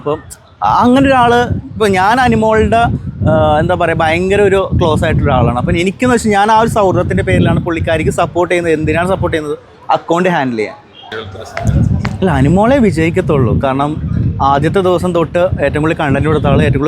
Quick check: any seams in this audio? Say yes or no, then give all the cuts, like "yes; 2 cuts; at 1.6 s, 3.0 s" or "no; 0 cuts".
yes; 1 cut; at 11.2 s